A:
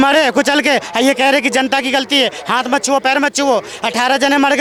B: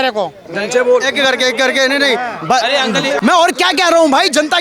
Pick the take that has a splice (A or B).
B